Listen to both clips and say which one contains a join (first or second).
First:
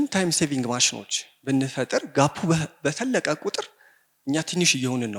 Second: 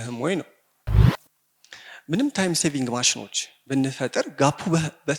second